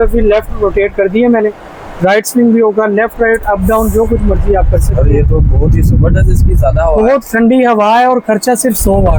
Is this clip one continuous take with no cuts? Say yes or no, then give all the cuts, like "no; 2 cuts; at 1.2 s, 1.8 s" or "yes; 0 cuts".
yes; 0 cuts